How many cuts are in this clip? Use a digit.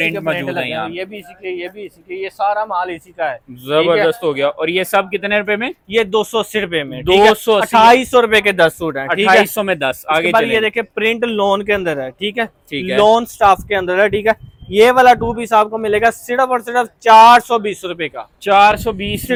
0